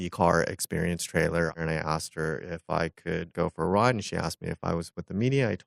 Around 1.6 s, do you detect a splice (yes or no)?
yes